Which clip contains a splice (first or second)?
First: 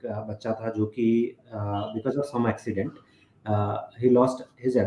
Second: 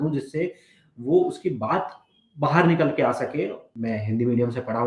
second